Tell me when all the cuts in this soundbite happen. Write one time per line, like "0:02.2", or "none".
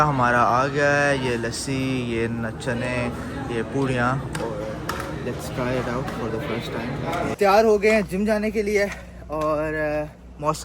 0:07.4